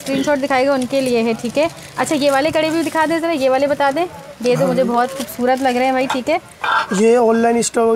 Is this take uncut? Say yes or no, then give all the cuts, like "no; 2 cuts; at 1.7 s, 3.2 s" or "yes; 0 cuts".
yes; 0 cuts